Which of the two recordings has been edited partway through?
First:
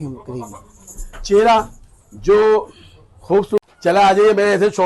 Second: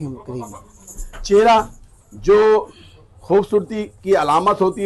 first; 1 cut; at 3.9 s

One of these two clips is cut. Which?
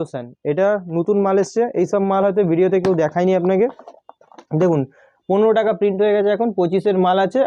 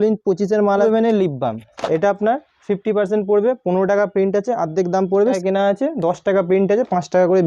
second; 2 cuts; at 0.8 s, 5.4 s

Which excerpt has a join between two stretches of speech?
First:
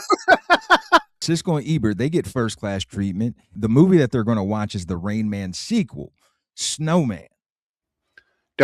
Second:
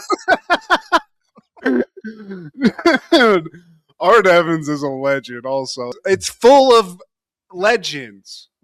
first; 1 cut; at 1.1 s

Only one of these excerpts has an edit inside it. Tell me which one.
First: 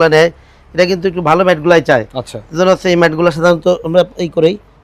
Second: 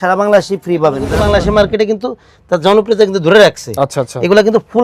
second; 1 cut; at 1.1 s

